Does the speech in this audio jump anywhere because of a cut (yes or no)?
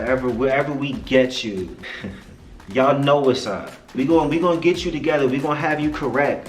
yes